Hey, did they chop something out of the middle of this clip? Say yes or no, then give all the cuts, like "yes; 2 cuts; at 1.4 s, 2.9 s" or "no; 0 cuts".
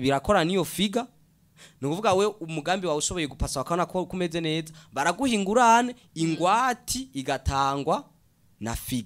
no; 0 cuts